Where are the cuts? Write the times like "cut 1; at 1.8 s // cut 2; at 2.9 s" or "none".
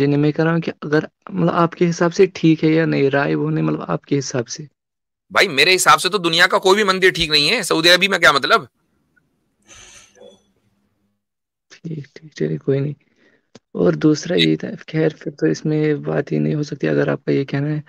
none